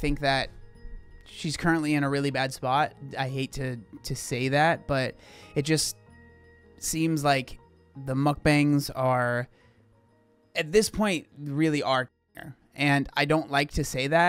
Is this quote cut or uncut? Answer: uncut